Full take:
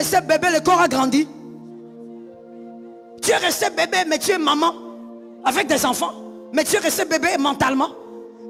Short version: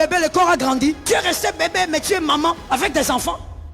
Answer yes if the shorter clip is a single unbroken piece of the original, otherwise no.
no